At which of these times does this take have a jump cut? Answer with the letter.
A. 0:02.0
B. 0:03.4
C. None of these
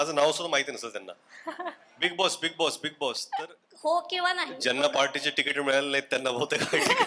B